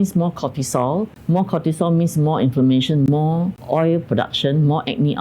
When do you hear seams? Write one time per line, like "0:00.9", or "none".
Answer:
0:01.2
0:03.6